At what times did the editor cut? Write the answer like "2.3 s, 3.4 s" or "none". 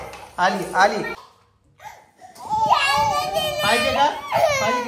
1.1 s